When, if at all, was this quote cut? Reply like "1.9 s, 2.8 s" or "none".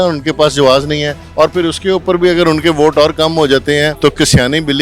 1.2 s, 3.9 s